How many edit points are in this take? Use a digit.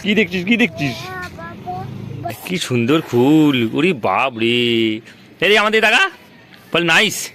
1